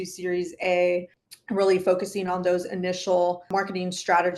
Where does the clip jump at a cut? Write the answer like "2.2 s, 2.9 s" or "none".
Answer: 1.2 s, 3.5 s